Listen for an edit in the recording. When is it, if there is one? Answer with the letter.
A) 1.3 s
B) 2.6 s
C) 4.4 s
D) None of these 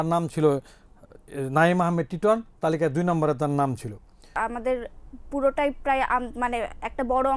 C